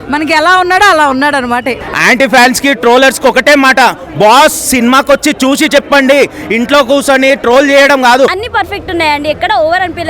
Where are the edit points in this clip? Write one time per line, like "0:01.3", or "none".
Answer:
0:01.8
0:08.4